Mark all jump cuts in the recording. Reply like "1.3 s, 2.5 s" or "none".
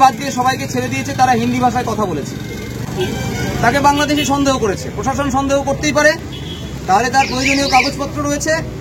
none